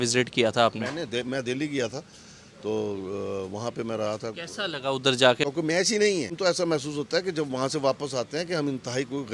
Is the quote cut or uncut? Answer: cut